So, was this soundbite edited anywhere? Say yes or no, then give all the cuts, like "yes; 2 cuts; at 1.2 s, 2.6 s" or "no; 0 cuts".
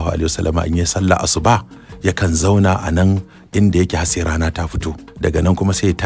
yes; 1 cut; at 5.0 s